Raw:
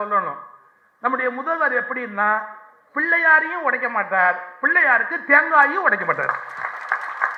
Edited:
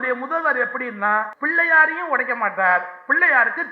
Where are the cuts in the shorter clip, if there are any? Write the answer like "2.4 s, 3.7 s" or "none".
1.4 s